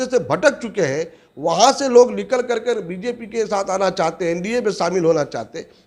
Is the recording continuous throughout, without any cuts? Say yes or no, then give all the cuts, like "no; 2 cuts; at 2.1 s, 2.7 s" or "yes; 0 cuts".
yes; 0 cuts